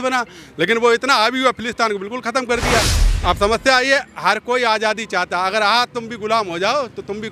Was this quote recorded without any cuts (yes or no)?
no